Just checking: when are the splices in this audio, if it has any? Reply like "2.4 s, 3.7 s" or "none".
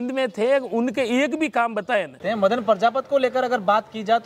2.4 s